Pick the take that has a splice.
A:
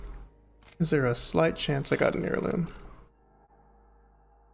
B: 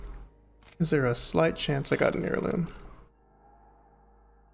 A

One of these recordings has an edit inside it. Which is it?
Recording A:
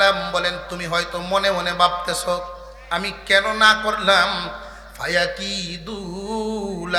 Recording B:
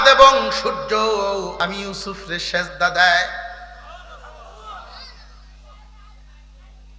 B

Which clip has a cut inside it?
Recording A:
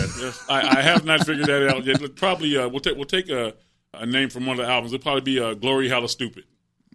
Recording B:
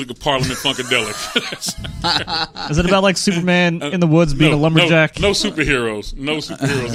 A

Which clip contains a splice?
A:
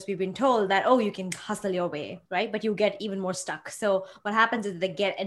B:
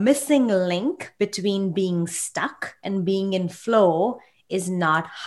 A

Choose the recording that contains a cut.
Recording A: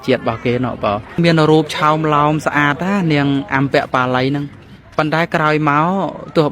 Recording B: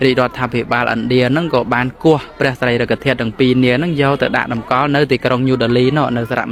A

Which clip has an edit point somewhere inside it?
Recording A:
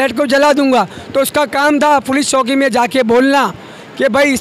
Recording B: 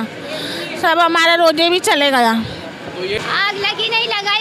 B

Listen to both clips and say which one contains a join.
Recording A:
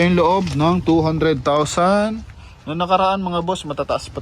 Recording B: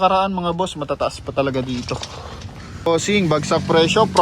B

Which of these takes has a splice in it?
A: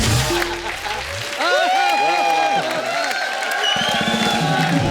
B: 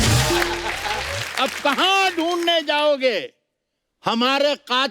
B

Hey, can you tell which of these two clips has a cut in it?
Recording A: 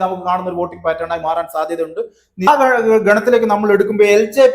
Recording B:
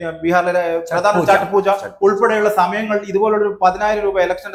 A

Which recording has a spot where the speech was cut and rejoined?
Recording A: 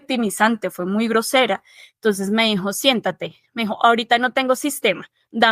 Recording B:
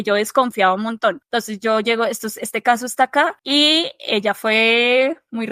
B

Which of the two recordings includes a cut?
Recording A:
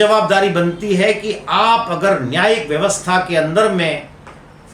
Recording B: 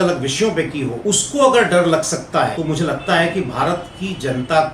B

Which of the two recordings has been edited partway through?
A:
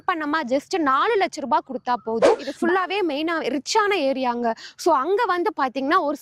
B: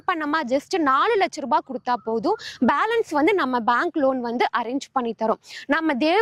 A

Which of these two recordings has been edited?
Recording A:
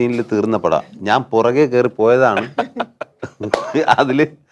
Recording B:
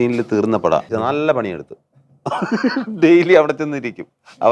B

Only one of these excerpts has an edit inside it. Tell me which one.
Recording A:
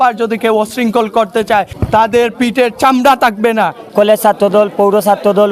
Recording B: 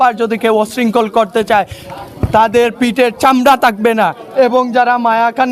A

